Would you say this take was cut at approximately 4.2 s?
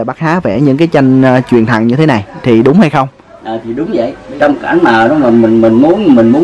yes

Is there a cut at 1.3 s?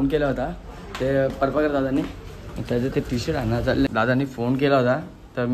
no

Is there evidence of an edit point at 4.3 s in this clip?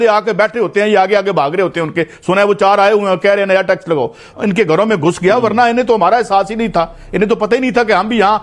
yes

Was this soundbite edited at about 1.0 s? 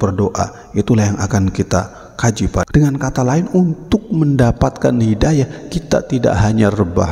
no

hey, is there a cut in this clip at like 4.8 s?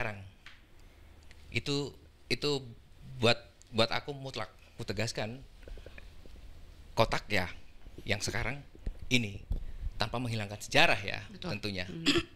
yes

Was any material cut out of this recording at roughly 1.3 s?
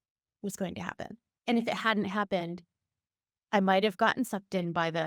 yes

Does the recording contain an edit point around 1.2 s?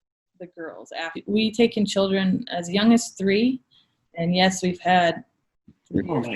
yes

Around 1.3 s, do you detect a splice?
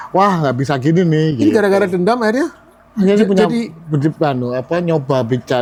no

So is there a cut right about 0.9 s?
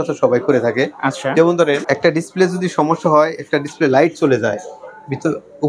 no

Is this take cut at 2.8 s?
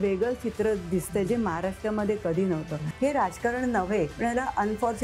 yes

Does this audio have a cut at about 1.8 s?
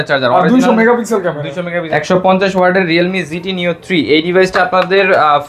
yes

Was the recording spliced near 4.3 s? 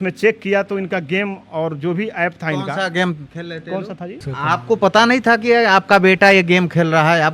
yes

